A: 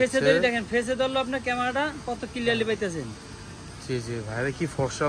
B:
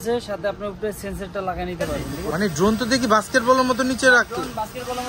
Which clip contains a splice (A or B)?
B